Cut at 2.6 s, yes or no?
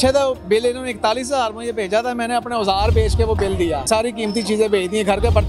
no